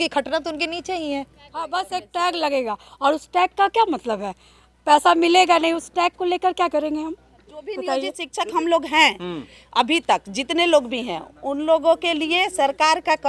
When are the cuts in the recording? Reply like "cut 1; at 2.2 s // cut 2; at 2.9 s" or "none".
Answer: cut 1; at 1.7 s // cut 2; at 8.2 s